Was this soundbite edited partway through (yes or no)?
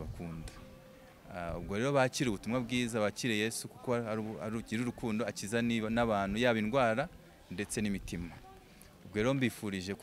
no